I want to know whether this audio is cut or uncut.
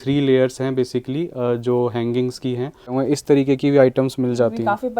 cut